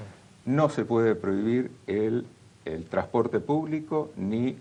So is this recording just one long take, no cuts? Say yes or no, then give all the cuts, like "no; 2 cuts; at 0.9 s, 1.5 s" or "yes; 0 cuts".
yes; 0 cuts